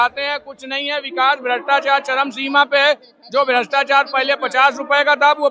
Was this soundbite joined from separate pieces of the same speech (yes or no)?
no